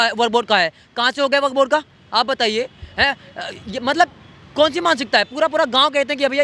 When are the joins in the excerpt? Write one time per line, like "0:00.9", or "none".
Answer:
none